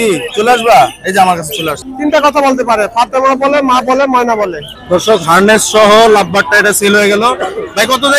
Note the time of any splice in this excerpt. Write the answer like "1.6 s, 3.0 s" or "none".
1.8 s, 4.7 s

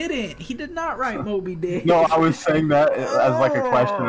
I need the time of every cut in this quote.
none

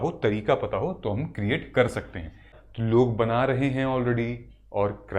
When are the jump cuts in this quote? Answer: 2.5 s

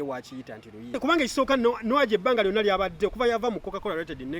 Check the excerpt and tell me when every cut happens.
1.0 s

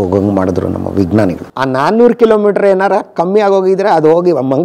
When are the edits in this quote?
1.5 s

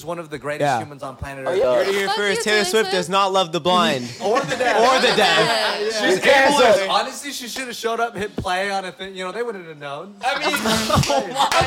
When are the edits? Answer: 1.6 s, 6.8 s

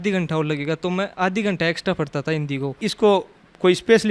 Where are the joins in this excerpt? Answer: 2.8 s

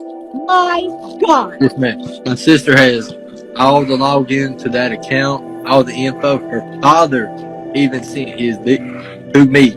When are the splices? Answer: 1.5 s

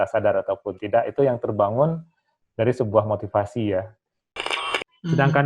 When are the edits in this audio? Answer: 4.4 s

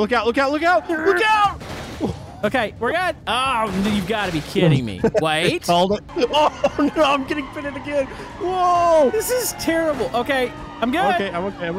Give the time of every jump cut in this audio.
3.2 s, 6.1 s

